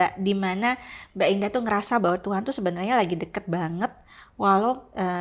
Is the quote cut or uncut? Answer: uncut